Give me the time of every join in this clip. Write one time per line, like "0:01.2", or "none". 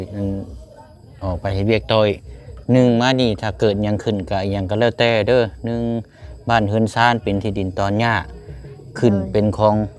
none